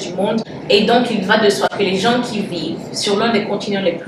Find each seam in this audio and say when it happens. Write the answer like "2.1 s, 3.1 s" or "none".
none